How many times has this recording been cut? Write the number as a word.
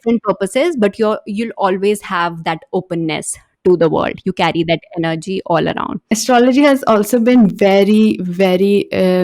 one